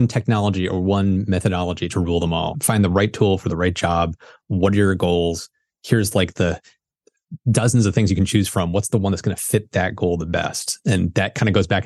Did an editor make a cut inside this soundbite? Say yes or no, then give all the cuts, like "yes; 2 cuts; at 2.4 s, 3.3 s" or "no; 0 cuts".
yes; 1 cut; at 2.6 s